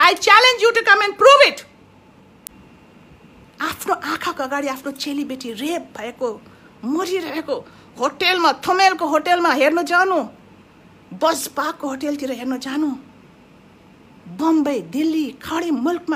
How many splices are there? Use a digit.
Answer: 1